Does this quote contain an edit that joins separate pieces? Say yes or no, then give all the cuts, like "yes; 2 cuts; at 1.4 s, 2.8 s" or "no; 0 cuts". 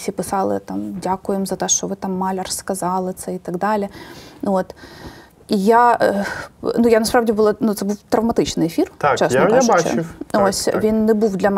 no; 0 cuts